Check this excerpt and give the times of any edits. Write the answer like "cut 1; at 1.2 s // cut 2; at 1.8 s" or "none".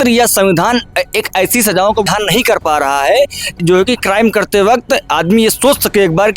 cut 1; at 2.1 s // cut 2; at 3.6 s